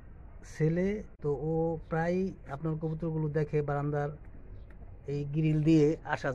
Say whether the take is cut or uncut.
cut